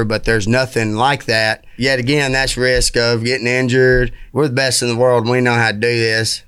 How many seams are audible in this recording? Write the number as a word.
two